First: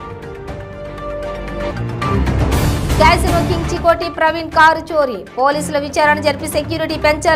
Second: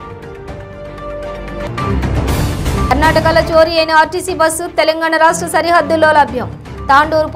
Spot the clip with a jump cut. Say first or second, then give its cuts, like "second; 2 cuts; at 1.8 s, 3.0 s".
second; 1 cut; at 1.7 s